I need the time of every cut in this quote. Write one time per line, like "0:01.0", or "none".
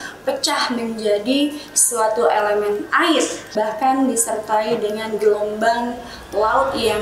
0:03.4